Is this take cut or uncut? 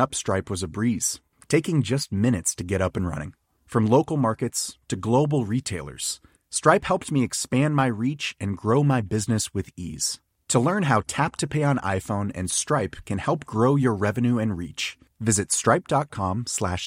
uncut